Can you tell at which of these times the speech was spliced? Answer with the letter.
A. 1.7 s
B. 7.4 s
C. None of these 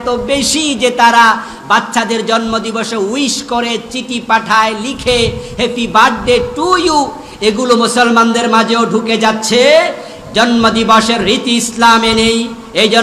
C